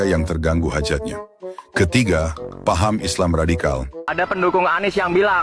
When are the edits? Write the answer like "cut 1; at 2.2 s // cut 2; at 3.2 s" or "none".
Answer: cut 1; at 4.4 s